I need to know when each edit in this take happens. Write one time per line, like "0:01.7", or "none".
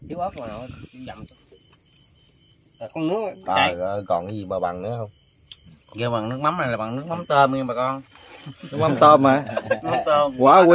0:01.3